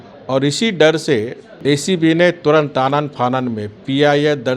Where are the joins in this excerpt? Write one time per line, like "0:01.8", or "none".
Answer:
0:01.4